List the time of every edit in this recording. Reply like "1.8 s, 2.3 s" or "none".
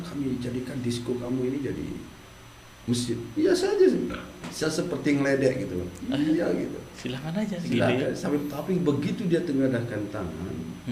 none